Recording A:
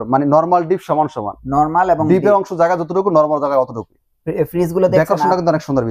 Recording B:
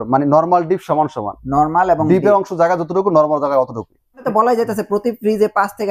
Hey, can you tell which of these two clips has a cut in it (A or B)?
B